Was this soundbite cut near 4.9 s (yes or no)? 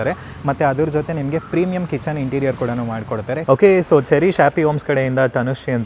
no